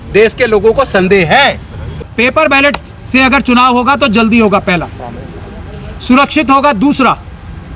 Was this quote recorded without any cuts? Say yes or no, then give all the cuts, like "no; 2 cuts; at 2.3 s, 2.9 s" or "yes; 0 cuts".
no; 1 cut; at 2.1 s